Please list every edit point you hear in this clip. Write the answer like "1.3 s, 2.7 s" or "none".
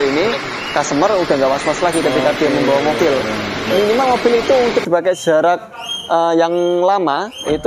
none